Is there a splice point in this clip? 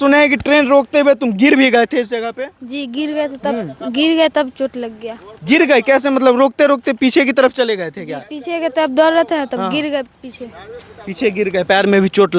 no; 0 cuts

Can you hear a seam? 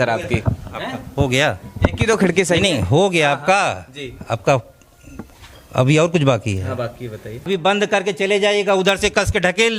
yes; 1 cut; at 7.5 s

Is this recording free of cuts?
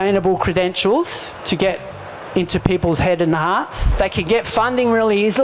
no; 1 cut; at 3.8 s

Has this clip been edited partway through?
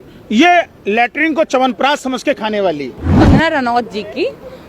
yes; 1 cut; at 3.2 s

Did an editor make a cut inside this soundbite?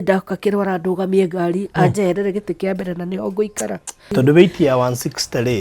yes; 1 cut; at 4.1 s

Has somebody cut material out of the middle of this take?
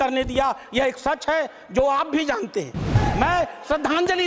yes; 1 cut; at 3.0 s

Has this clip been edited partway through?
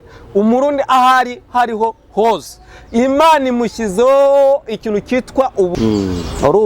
yes; 1 cut; at 5.7 s

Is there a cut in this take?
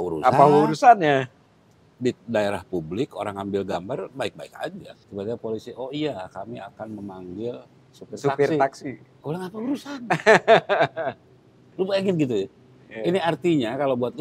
yes; 2 cuts; at 5.0 s, 9.1 s

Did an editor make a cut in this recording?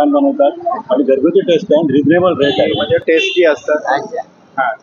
yes; 1 cut; at 2.8 s

